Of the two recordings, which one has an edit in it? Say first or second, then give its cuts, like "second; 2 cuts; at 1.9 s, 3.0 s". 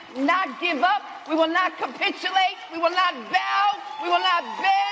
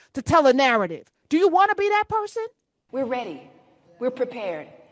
second; 1 cut; at 2.9 s